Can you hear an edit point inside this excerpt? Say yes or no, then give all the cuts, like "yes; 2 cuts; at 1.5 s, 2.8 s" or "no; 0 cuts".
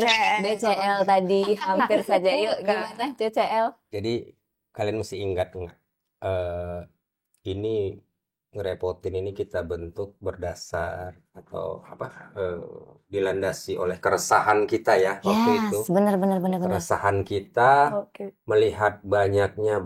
no; 0 cuts